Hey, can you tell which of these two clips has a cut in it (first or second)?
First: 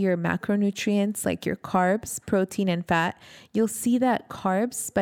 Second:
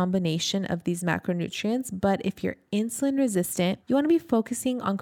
second